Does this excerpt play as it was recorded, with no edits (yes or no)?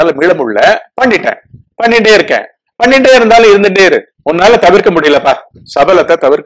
yes